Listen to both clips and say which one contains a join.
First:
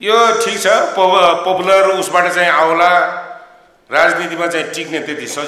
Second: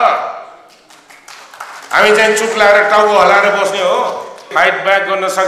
second; 1 cut; at 4.5 s

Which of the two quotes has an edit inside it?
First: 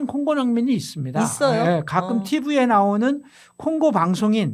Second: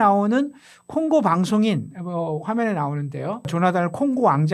second; 1 cut; at 3.5 s

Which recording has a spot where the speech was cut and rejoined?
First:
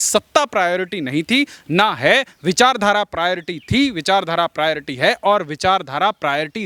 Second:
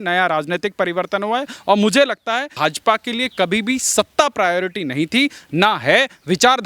second; 1 cut; at 2.5 s

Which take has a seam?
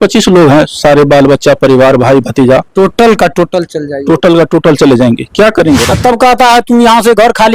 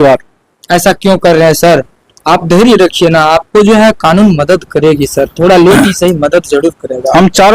first; 1 cut; at 5.9 s

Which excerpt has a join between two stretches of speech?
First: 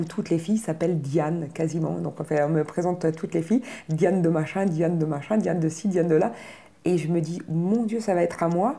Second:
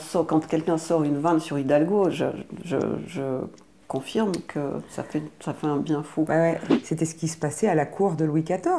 second; 1 cut; at 6.7 s

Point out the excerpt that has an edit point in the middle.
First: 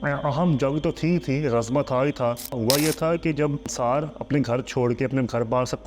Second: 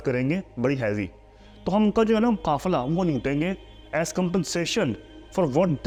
first; 2 cuts; at 2.6 s, 3.7 s

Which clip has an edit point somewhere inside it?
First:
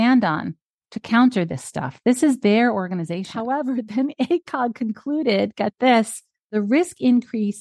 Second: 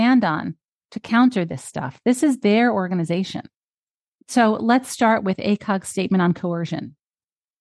first; 2 cuts; at 3.4 s, 6.5 s

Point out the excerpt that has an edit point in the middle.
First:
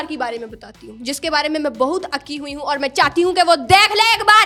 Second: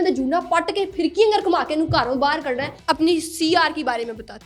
second; 1 cut; at 2.8 s

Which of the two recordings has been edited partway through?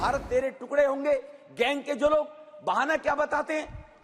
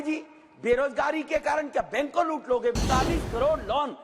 second; 1 cut; at 2.7 s

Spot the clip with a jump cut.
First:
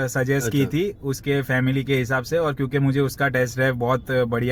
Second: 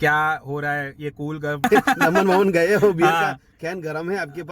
second; 1 cut; at 1.6 s

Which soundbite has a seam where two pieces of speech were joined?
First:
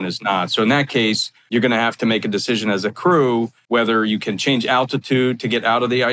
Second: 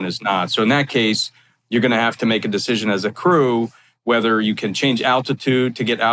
first; 2 cuts; at 1.3 s, 3.6 s

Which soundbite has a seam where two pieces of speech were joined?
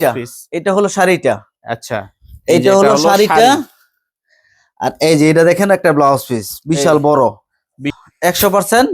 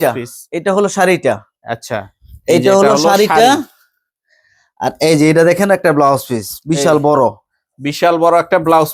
first; 1 cut; at 7.9 s

